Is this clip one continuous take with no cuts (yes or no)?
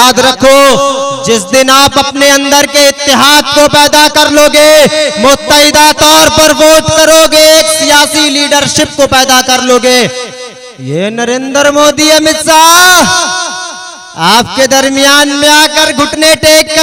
yes